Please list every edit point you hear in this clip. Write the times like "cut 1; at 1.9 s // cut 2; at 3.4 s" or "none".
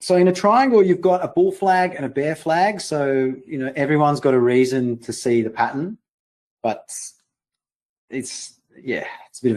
cut 1; at 2.5 s